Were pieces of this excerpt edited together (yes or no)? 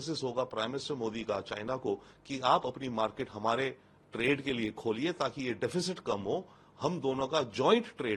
no